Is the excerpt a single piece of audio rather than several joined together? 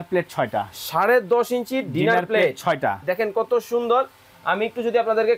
yes; 0 cuts

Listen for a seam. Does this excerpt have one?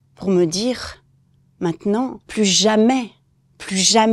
no; 0 cuts

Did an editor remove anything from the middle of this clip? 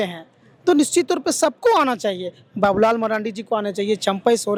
no; 0 cuts

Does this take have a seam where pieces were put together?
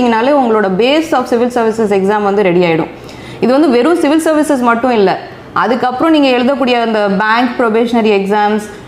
no; 0 cuts

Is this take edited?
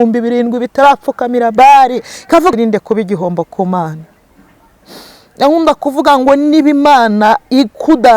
yes; 1 cut; at 2.5 s

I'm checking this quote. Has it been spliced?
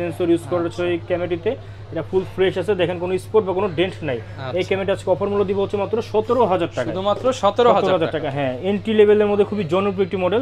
no; 0 cuts

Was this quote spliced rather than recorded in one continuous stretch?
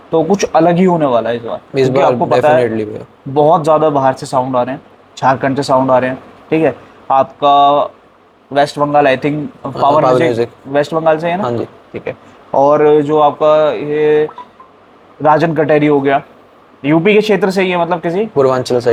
no; 0 cuts

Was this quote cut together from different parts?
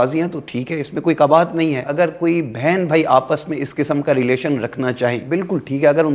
yes; 2 cuts; at 1.9 s, 5.2 s

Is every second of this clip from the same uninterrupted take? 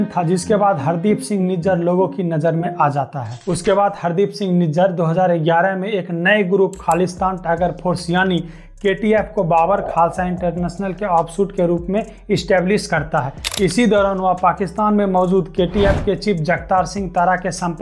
yes; 0 cuts

